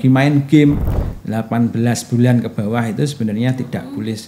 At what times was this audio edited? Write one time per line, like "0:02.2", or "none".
0:01.0